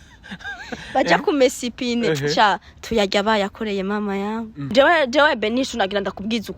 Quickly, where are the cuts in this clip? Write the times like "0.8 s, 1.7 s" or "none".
4.6 s